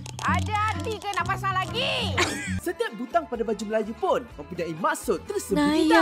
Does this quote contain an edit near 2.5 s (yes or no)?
yes